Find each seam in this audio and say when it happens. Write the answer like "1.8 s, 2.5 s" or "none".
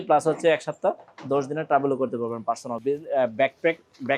2.7 s